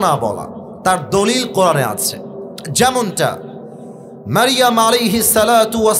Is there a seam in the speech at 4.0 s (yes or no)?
no